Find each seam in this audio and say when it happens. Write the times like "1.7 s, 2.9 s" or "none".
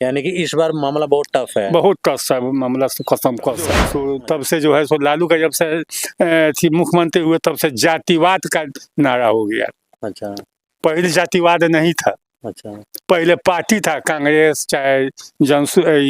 3.9 s